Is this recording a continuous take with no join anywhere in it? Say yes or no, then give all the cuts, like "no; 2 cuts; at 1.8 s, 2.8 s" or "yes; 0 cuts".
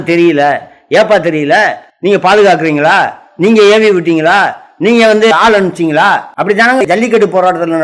no; 2 cuts; at 1.8 s, 6.8 s